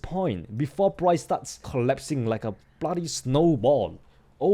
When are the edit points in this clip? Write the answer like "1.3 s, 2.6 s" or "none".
1.7 s